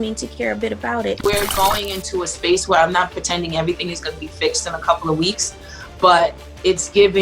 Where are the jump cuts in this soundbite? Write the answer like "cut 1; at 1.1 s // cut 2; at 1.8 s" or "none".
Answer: cut 1; at 1.2 s